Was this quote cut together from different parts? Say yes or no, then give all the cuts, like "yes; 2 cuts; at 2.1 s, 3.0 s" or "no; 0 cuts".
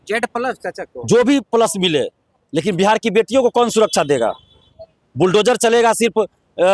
no; 0 cuts